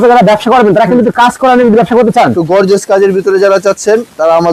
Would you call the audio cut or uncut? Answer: uncut